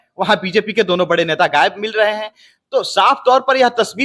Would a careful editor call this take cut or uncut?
uncut